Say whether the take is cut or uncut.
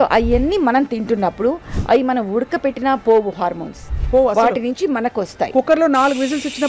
uncut